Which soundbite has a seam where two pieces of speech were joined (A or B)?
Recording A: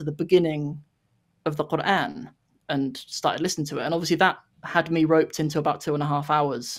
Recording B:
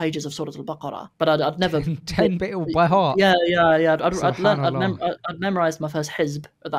B